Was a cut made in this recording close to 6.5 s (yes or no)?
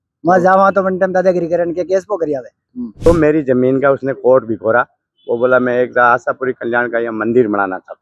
no